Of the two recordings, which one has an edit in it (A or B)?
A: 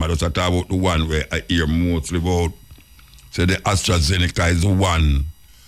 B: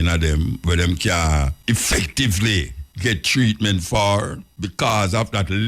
B